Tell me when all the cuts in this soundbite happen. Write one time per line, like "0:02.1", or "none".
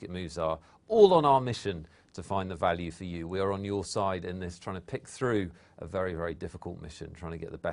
0:06.1